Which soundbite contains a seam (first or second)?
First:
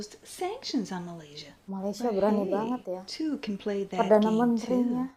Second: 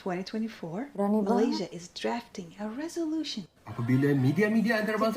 second